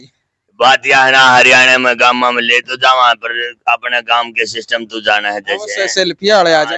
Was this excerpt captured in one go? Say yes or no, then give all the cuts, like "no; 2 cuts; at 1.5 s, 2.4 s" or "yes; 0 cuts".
yes; 0 cuts